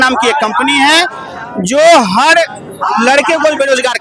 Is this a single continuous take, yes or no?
yes